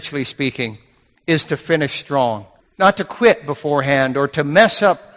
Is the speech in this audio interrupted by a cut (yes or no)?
no